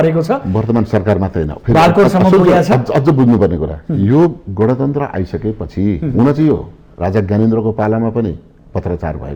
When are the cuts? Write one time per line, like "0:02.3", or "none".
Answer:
none